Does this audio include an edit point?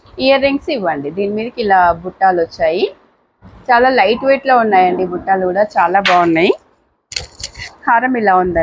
no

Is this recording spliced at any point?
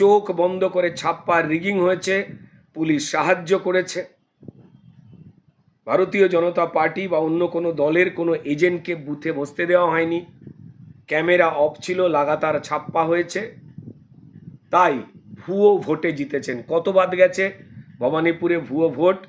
no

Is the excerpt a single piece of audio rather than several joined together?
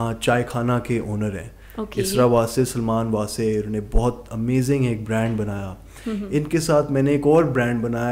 yes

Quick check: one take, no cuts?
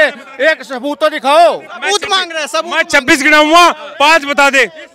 yes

